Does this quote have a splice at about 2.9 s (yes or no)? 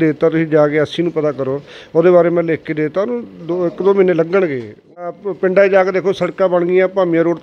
no